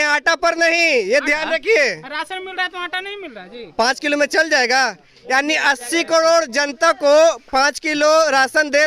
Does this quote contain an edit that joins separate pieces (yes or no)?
no